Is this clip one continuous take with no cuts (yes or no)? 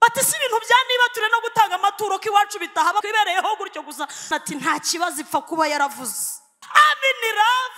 no